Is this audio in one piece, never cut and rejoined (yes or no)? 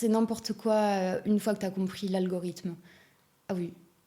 yes